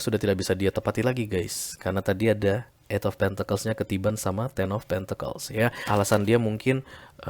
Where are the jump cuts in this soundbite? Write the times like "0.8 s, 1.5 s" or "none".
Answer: 5.8 s